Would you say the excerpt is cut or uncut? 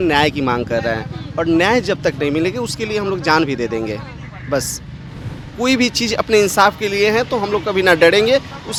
uncut